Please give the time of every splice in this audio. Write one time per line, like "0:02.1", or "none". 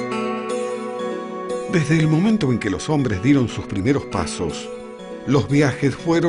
0:02.8